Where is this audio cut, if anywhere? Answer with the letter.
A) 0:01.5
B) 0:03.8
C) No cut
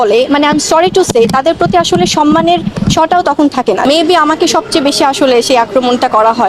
B